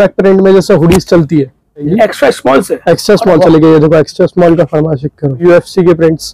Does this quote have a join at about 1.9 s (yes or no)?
yes